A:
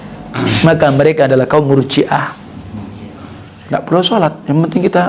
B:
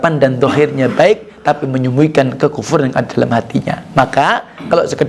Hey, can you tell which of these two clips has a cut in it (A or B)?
A